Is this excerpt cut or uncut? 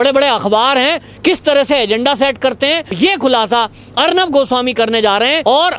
cut